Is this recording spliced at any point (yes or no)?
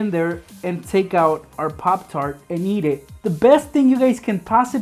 yes